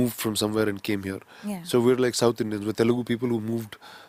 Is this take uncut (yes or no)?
yes